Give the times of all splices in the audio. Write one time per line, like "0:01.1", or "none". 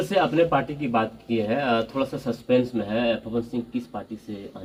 none

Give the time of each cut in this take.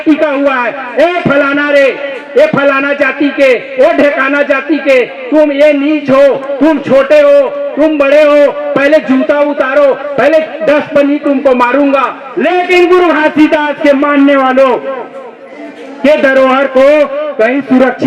0:12.2

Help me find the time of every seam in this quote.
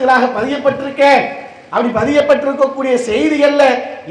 none

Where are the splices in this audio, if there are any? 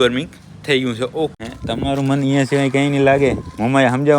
0:01.4

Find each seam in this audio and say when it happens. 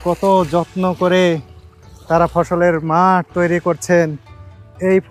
none

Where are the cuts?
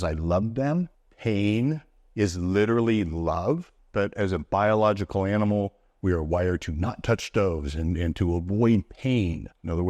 0:01.0
0:03.8

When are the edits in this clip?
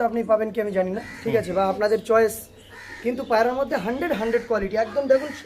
none

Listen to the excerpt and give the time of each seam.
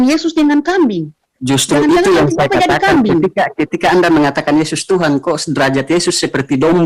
none

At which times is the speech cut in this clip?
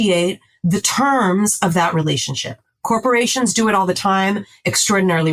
none

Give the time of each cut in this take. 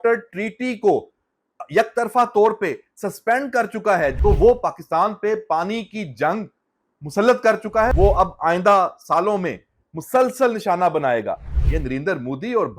0:04.2
0:07.9

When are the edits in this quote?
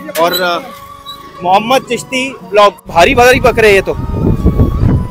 0:02.9

